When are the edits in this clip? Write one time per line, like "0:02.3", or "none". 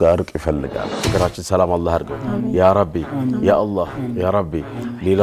0:00.9